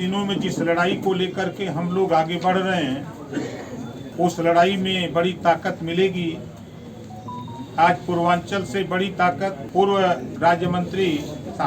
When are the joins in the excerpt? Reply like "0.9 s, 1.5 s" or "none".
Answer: 4.0 s, 9.6 s